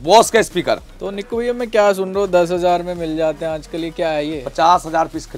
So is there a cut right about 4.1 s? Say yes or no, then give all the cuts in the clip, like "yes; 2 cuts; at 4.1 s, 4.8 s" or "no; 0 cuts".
no; 0 cuts